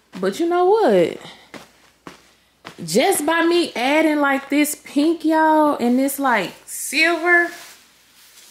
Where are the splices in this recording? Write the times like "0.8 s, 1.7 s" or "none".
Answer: none